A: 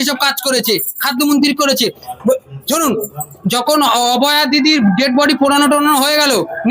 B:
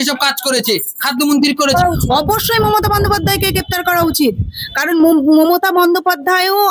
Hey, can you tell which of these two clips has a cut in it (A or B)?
B